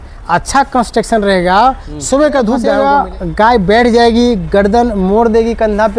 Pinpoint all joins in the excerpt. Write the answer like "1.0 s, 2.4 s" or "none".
2.7 s